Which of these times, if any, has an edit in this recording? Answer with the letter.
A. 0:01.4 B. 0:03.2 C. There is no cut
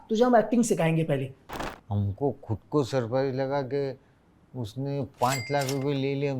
A